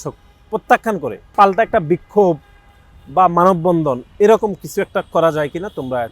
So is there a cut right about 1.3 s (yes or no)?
yes